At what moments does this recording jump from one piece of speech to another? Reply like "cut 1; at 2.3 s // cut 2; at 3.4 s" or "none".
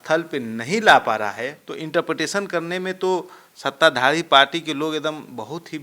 cut 1; at 1.6 s